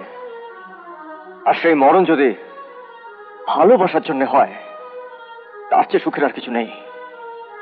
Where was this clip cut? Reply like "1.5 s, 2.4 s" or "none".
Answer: none